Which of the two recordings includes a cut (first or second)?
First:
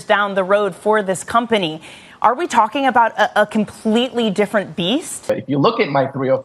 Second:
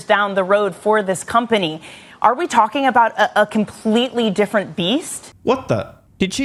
first